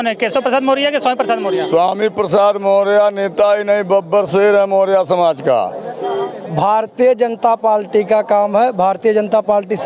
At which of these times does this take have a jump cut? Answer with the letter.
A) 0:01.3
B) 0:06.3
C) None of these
B